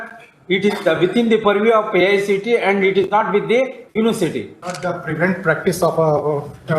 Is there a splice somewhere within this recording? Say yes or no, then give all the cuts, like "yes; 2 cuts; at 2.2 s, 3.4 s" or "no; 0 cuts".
yes; 1 cut; at 4.6 s